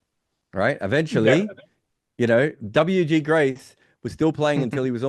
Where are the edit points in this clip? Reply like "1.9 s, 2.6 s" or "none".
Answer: none